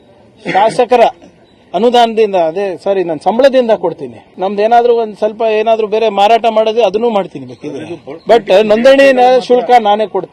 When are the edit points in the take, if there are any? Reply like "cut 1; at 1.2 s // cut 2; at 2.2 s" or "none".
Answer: cut 1; at 4.2 s